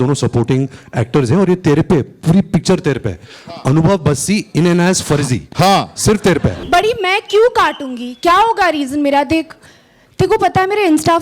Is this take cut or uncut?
cut